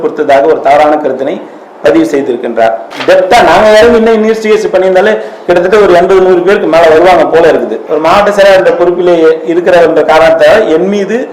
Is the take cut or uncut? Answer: cut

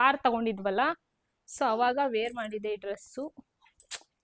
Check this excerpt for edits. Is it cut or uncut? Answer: uncut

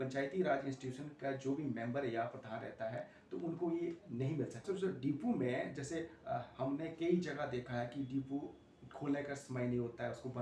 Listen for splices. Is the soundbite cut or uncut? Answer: cut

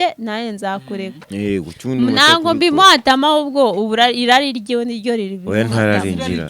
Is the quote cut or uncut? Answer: cut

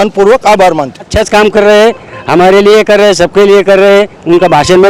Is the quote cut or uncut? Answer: cut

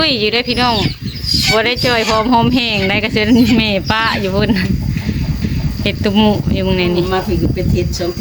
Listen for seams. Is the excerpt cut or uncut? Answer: uncut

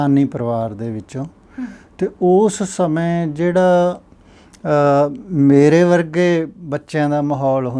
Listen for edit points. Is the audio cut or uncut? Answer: uncut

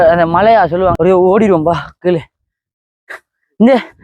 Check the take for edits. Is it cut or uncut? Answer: cut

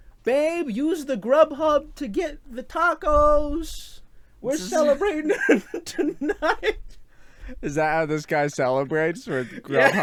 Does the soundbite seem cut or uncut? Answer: uncut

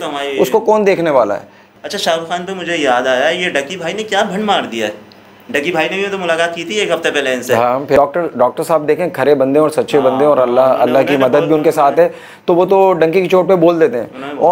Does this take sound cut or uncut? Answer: cut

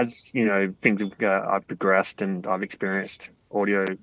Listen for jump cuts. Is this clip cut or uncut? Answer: uncut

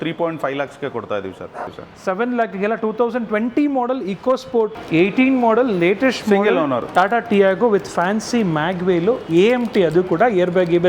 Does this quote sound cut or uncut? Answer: cut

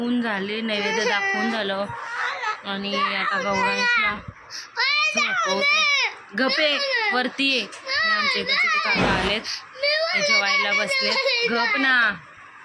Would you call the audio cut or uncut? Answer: uncut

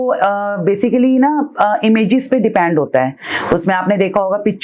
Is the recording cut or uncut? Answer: uncut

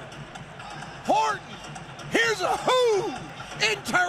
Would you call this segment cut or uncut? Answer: uncut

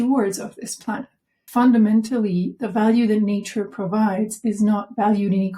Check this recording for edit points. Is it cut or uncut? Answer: cut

